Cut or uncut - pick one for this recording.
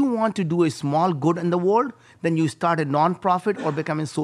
uncut